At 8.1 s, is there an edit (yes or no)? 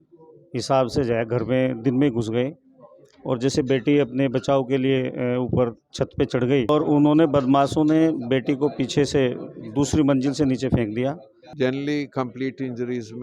no